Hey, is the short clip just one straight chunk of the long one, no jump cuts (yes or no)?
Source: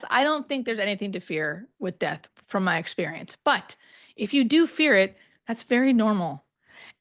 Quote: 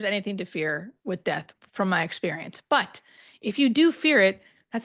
yes